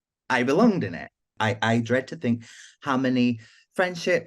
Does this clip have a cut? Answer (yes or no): yes